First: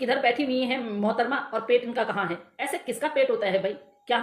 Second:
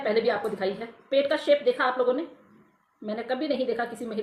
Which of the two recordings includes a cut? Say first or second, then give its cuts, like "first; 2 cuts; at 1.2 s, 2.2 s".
first; 1 cut; at 2.5 s